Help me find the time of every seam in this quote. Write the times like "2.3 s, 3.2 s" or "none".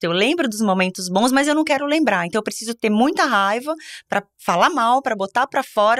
none